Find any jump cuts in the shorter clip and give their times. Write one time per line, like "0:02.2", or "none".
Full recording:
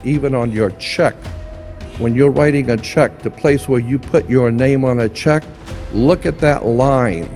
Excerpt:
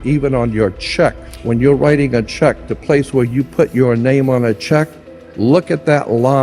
0:01.3